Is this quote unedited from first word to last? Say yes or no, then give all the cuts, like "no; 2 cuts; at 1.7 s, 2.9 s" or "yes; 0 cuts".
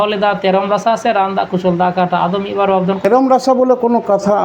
no; 1 cut; at 3.0 s